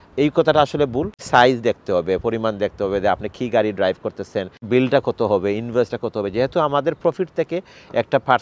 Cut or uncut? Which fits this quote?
cut